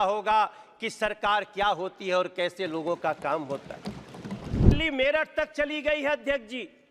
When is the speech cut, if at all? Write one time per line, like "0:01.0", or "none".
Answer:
0:04.7